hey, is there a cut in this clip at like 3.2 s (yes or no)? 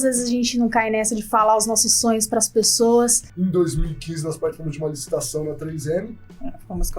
yes